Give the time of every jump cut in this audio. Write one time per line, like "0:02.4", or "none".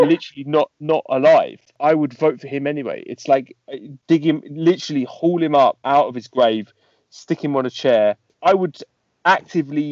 0:01.7
0:08.3